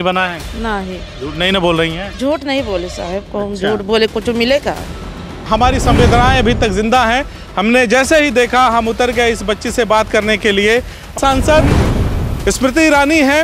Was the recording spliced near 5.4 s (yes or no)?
yes